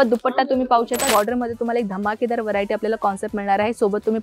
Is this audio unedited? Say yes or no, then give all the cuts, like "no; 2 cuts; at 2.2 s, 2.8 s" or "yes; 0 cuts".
no; 1 cut; at 1.1 s